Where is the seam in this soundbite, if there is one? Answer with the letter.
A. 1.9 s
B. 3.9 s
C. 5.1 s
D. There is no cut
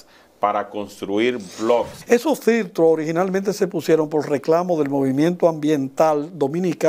A